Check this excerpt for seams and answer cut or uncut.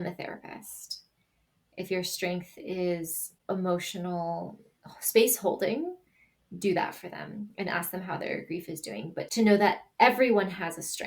cut